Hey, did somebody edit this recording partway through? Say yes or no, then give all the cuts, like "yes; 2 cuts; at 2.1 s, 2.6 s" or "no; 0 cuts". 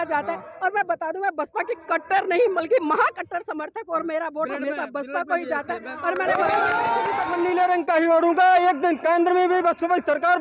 yes; 1 cut; at 7.2 s